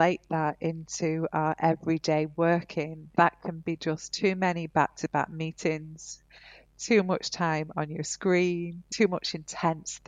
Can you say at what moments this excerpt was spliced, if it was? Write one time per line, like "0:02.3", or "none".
0:03.0
0:08.8